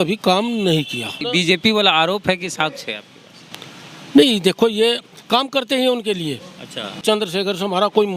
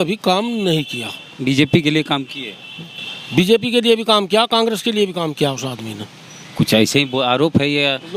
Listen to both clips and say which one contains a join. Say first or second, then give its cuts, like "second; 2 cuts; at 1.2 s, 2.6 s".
first; 2 cuts; at 1.2 s, 7.0 s